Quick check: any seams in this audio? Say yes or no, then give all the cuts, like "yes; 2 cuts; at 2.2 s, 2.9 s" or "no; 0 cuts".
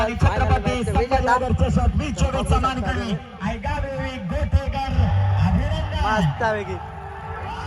no; 0 cuts